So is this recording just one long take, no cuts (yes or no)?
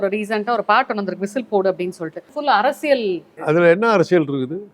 no